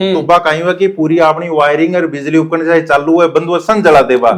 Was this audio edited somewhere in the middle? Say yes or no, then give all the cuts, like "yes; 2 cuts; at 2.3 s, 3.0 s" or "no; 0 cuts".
no; 0 cuts